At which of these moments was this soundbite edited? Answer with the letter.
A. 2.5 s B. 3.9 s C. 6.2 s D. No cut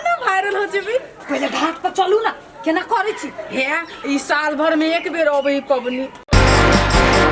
C